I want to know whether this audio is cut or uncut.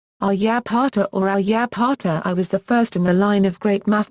uncut